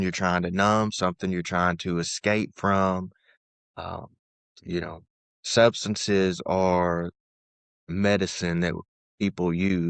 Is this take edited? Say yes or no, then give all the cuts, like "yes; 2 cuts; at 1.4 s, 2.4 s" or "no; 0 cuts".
no; 0 cuts